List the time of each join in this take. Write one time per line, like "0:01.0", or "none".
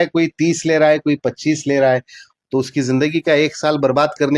none